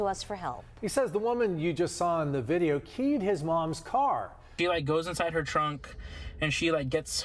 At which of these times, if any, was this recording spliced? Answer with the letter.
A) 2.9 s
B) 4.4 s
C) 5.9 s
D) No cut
B